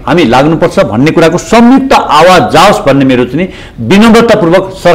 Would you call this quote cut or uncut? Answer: uncut